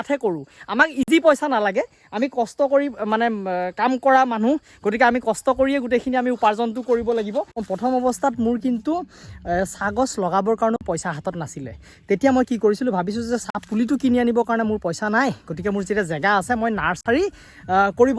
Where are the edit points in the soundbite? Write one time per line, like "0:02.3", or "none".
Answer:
0:07.6